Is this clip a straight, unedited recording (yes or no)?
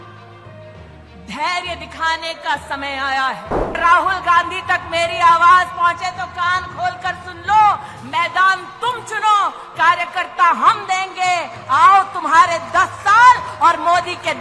no